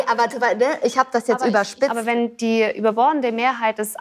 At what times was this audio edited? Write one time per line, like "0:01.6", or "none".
0:02.0